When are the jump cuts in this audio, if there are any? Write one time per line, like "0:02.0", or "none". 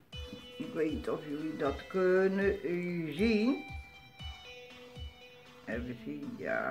none